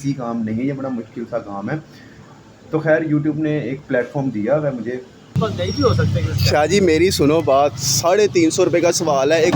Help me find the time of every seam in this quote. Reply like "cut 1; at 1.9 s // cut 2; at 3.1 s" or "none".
cut 1; at 5.4 s